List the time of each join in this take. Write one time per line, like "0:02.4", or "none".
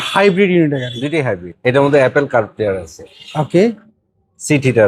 0:01.5